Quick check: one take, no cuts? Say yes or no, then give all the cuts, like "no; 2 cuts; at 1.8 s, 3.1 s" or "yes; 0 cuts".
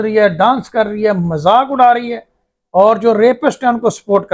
yes; 0 cuts